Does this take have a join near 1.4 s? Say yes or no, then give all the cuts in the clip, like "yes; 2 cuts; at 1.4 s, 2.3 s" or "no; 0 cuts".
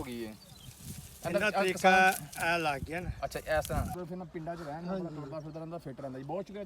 no; 1 cut; at 4.0 s